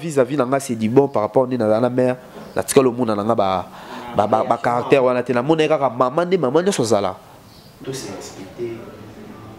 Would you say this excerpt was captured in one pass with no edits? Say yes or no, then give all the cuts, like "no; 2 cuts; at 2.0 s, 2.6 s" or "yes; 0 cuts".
no; 1 cut; at 7.7 s